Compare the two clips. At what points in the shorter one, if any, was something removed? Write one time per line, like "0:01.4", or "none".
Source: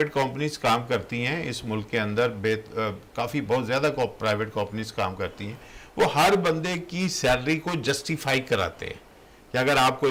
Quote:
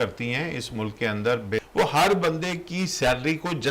0:01.6